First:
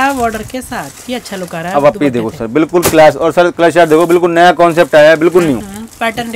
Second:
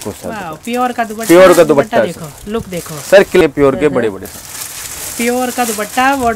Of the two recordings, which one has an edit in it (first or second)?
second